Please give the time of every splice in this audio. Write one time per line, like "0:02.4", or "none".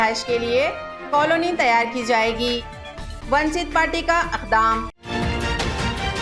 0:05.0